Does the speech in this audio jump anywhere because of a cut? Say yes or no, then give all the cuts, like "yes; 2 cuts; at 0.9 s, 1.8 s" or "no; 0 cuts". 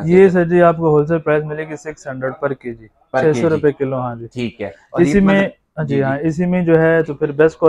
no; 0 cuts